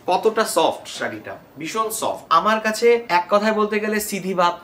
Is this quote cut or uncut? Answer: cut